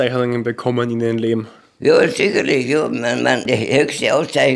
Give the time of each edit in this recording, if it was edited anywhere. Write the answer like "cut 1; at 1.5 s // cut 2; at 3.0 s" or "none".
cut 1; at 3.5 s